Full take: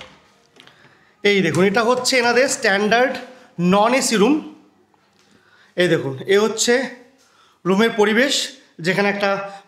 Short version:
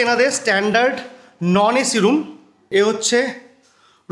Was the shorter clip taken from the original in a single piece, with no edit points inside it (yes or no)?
no